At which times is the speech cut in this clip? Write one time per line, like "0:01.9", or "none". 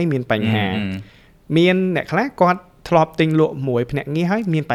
none